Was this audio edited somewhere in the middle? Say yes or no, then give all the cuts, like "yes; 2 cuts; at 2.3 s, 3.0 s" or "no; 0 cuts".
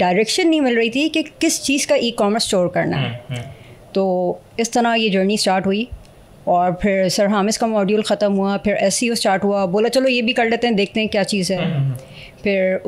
no; 0 cuts